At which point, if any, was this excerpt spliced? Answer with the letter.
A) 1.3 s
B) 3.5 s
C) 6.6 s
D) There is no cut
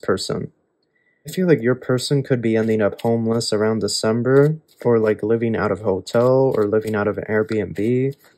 A